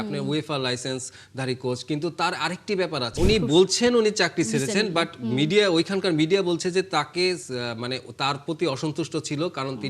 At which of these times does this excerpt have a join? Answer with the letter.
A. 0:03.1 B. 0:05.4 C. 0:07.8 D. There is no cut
A